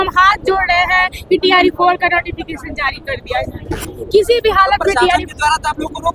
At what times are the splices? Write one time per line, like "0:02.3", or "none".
none

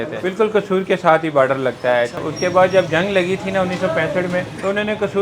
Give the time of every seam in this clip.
0:02.1

